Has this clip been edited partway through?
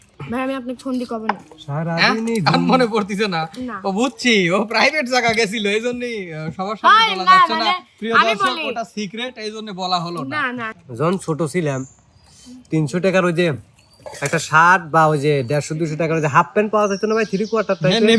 yes; 1 cut; at 10.7 s

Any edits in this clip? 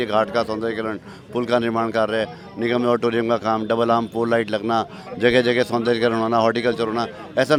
no; 0 cuts

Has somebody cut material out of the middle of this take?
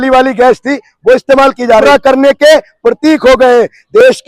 yes; 1 cut; at 1.8 s

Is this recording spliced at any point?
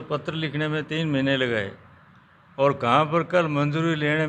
no; 0 cuts

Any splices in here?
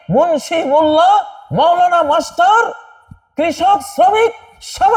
no; 0 cuts

